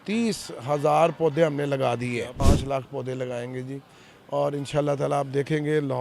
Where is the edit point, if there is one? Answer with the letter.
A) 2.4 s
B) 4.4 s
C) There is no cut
A